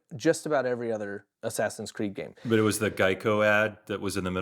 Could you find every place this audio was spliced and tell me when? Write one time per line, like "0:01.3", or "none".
0:01.3
0:02.5